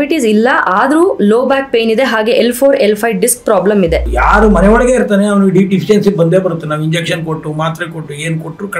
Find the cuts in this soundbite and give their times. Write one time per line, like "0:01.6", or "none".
0:04.1